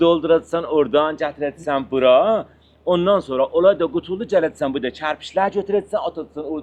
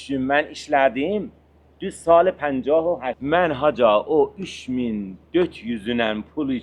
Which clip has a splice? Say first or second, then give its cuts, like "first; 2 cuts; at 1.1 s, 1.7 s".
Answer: second; 1 cut; at 3.1 s